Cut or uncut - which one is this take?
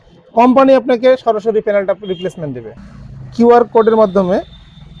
cut